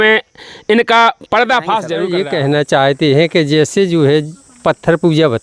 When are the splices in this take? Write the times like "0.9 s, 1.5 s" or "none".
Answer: 2.0 s

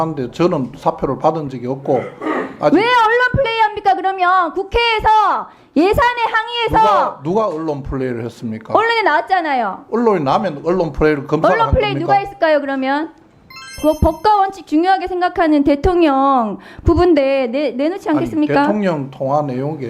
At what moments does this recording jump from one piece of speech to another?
13.8 s

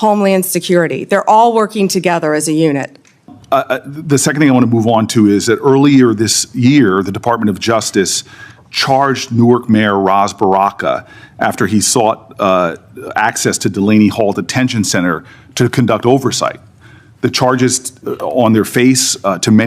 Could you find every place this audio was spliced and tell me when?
3.3 s

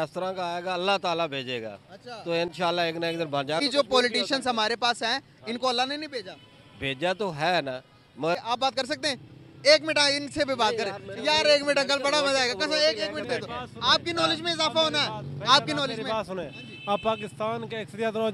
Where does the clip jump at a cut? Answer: 3.6 s, 8.4 s

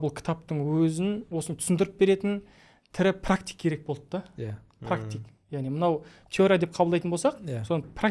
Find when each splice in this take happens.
1.2 s

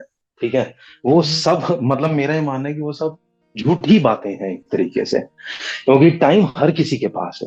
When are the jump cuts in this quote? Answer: none

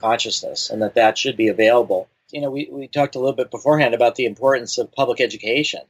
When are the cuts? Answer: 2.3 s

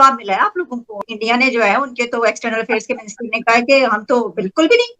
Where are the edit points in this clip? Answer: 1.0 s

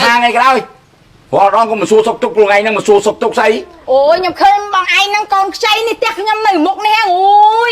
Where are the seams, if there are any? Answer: none

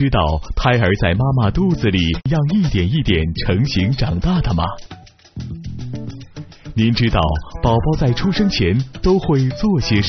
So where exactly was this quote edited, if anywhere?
2.3 s

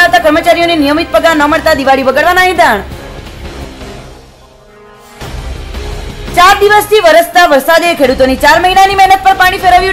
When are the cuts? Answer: none

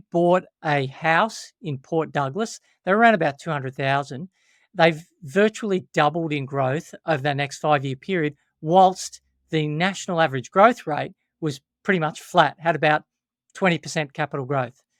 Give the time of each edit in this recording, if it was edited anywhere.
none

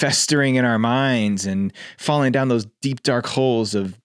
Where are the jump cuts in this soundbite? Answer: none

